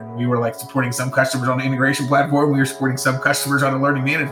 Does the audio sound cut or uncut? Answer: uncut